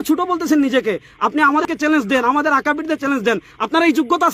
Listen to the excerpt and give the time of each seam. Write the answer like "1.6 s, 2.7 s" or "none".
1.6 s